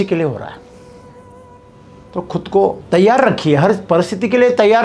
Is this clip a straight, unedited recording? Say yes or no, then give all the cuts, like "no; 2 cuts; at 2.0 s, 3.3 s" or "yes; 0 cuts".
no; 2 cuts; at 1.4 s, 2.8 s